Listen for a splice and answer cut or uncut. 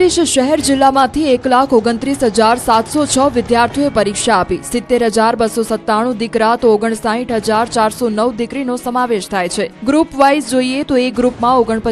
uncut